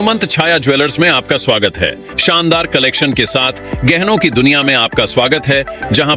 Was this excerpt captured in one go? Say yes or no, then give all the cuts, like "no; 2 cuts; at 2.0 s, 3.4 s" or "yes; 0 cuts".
no; 1 cut; at 2.1 s